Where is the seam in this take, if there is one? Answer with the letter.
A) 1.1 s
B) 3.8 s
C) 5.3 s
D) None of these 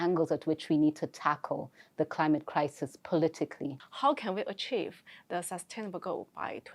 B